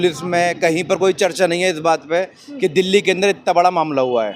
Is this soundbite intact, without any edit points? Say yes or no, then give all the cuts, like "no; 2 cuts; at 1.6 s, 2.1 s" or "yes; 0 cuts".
yes; 0 cuts